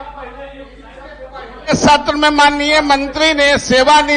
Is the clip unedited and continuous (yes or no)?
yes